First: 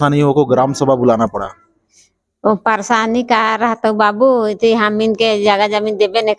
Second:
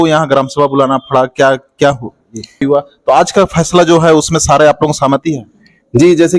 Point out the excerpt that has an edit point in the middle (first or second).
second